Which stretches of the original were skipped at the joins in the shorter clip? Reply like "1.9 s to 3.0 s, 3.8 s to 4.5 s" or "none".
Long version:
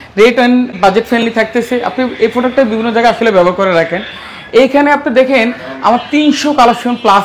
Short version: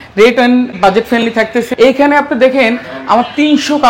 1.7 s to 4.4 s